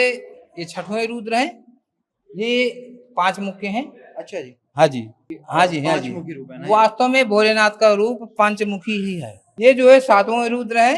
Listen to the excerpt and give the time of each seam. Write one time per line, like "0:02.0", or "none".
0:09.4